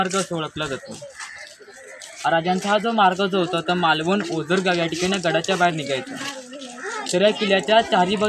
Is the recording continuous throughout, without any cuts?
yes; 0 cuts

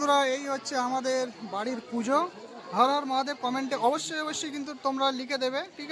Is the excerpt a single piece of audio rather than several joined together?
yes; 0 cuts

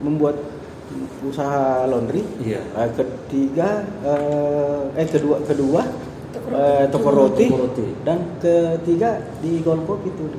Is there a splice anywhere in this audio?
no; 0 cuts

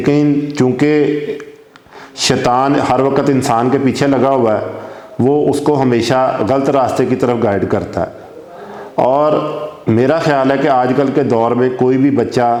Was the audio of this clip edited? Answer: no; 0 cuts

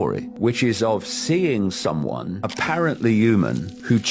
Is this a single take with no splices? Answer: yes; 0 cuts

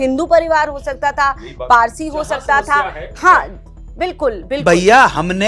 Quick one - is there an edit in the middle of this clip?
no; 0 cuts

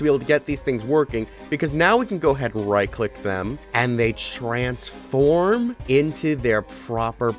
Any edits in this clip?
yes; 2 cuts; at 3.6 s, 5.8 s

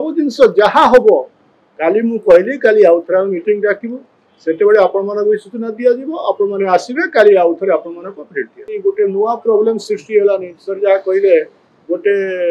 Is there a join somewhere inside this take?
yes; 1 cut; at 8.6 s

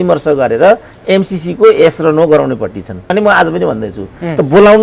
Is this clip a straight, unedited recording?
no; 1 cut; at 3.1 s

